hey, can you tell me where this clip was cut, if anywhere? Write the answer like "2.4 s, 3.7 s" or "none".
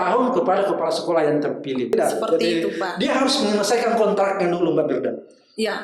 1.9 s